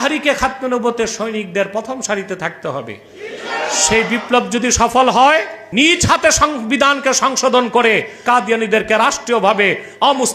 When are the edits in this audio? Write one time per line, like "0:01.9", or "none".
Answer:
0:05.7
0:08.2